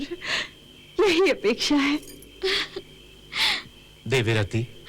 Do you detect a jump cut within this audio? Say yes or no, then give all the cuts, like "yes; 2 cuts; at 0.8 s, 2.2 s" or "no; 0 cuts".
yes; 1 cut; at 3.8 s